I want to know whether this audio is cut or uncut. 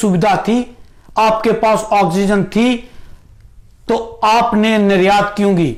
uncut